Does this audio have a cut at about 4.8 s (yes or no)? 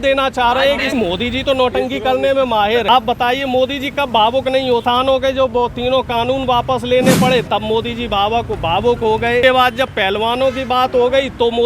yes